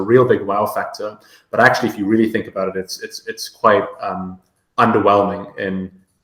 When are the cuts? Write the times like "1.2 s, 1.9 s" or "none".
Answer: none